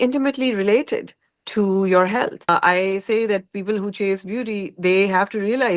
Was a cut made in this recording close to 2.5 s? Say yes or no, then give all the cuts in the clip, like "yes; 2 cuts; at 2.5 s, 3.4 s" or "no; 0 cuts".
yes; 1 cut; at 2.5 s